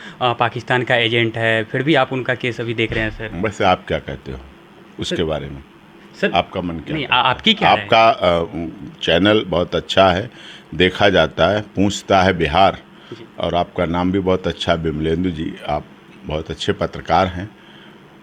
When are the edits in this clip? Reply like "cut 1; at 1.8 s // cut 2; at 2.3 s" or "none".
none